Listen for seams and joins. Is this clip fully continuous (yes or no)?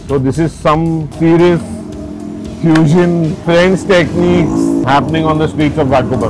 no